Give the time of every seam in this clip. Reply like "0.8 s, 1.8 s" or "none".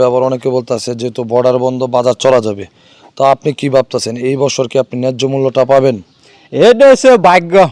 none